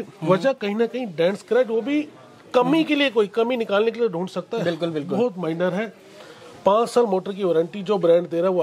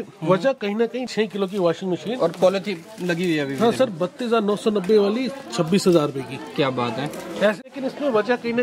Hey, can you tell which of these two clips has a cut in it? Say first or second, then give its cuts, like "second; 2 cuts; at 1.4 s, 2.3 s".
second; 2 cuts; at 1.1 s, 7.6 s